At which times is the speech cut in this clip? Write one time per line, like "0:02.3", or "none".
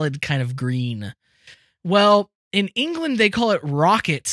0:02.4